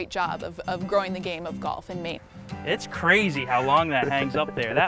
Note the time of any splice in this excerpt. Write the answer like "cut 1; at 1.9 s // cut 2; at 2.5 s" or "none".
cut 1; at 2.2 s

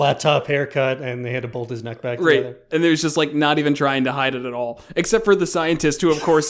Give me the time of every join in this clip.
cut 1; at 2.2 s

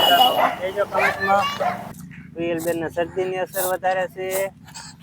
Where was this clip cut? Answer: cut 1; at 1.9 s

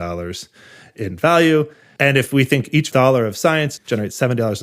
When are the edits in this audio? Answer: cut 1; at 1.8 s // cut 2; at 3.8 s

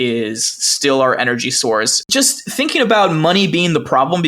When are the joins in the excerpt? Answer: cut 1; at 2.0 s

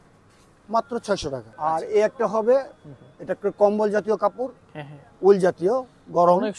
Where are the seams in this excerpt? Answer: cut 1; at 1.5 s

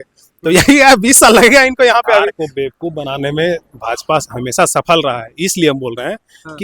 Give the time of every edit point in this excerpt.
cut 1; at 2.4 s

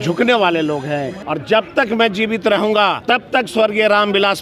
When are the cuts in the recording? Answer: cut 1; at 1.2 s // cut 2; at 3.0 s

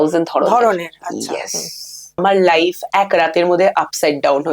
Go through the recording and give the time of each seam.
cut 1; at 2.2 s

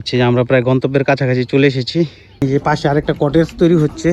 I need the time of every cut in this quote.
cut 1; at 2.4 s

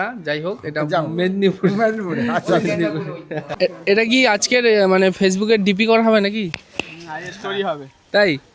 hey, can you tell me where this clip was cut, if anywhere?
cut 1; at 3.5 s

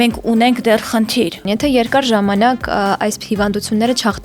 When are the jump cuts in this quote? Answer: cut 1; at 1.4 s

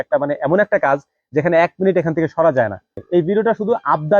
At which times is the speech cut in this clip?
cut 1; at 3.0 s

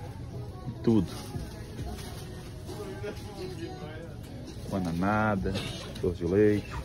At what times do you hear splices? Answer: none

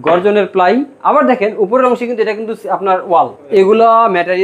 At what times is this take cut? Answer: cut 1; at 3.5 s

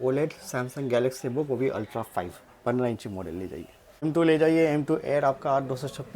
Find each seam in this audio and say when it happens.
cut 1; at 4.0 s

